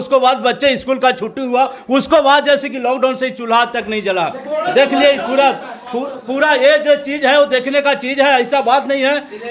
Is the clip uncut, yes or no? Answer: yes